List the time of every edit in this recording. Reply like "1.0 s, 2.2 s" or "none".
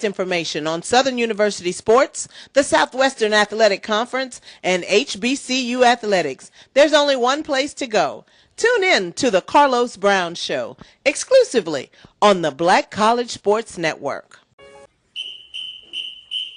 14.9 s